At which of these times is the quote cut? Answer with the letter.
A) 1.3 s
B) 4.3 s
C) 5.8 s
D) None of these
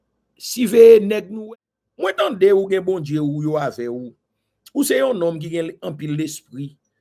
A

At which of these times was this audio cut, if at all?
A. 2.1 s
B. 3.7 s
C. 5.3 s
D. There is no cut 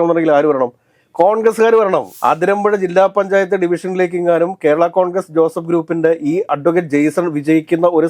A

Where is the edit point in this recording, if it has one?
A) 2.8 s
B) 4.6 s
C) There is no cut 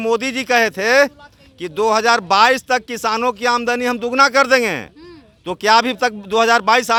C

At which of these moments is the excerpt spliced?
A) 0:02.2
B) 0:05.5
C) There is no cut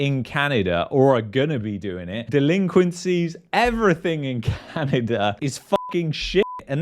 A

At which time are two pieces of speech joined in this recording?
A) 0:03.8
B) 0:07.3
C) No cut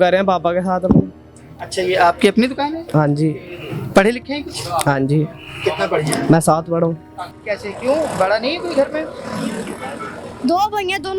B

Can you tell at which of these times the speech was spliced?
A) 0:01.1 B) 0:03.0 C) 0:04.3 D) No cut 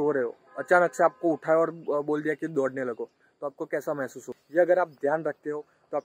C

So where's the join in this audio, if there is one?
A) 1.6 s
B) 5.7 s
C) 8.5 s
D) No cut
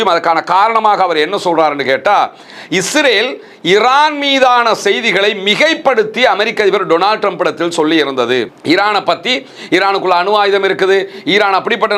D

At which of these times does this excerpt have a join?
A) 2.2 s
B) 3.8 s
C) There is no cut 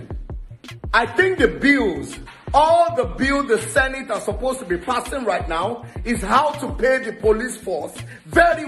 C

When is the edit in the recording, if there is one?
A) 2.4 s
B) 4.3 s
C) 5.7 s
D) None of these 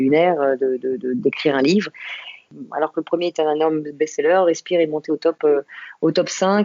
A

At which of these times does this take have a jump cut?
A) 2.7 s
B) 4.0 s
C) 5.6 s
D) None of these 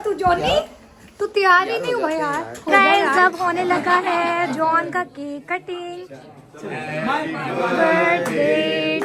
A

